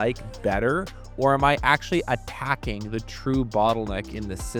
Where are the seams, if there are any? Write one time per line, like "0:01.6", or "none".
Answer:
none